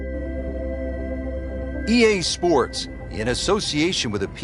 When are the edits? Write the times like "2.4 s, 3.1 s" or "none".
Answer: 1.8 s